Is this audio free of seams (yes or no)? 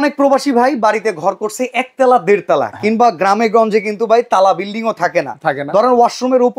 yes